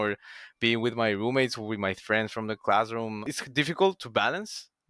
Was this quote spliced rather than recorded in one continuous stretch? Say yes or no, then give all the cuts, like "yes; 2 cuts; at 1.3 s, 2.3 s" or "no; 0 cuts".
yes; 1 cut; at 3.3 s